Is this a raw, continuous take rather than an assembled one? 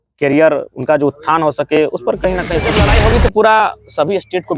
no; 1 cut; at 2.7 s

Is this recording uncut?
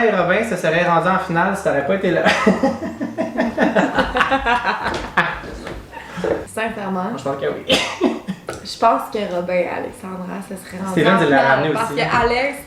yes; 0 cuts

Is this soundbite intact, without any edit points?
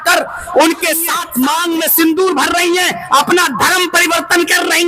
no; 1 cut; at 1.2 s

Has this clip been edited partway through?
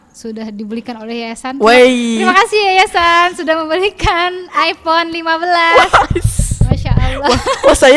no; 0 cuts

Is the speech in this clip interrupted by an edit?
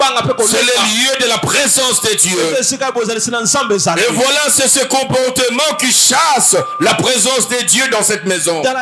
no; 0 cuts

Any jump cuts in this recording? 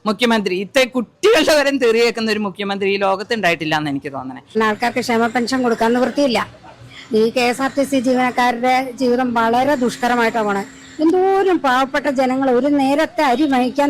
yes; 1 cut; at 4.5 s

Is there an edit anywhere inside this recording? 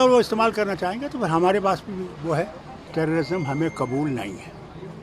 yes; 1 cut; at 2.8 s

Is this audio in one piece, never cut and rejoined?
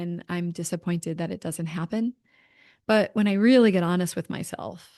yes; 0 cuts

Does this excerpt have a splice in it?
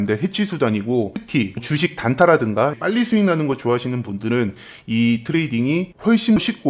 yes; 1 cut; at 1.2 s

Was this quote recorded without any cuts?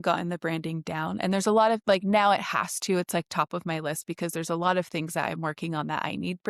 yes; 0 cuts

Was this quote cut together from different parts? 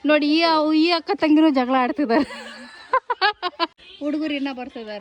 yes; 1 cut; at 3.8 s

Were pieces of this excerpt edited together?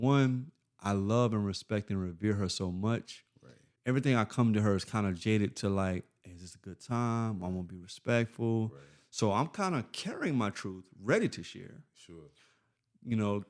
yes; 1 cut; at 3.6 s

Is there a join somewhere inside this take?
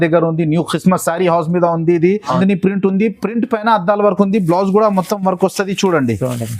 yes; 1 cut; at 2.3 s

